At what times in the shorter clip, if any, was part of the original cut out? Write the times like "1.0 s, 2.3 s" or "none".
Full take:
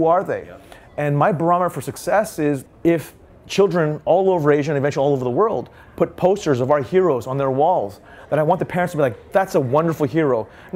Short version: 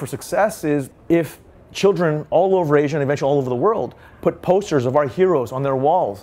none